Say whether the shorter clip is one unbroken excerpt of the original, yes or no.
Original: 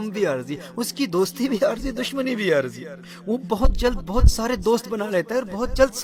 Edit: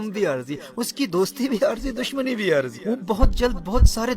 no